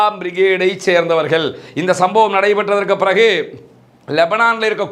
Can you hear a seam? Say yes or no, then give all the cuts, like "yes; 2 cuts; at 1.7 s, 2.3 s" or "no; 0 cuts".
no; 0 cuts